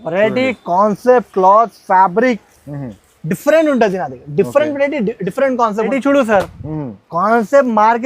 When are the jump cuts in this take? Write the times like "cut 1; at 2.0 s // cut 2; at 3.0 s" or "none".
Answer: cut 1; at 5.9 s